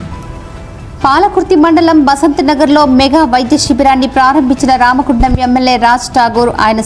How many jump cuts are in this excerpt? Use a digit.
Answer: 0